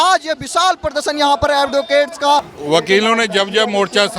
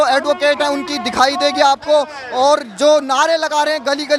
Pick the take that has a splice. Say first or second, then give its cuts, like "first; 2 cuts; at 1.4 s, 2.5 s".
first; 1 cut; at 2.5 s